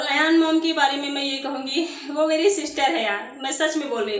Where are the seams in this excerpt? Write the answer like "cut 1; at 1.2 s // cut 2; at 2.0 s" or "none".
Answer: none